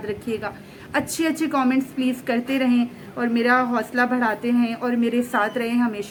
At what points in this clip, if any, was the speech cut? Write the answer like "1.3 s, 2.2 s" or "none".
none

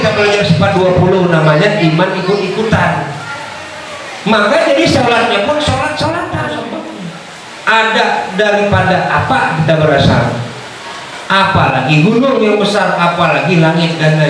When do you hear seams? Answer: 6.6 s, 7.8 s

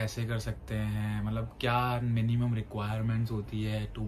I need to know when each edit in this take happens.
none

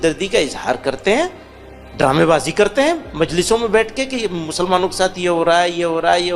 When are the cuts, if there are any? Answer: none

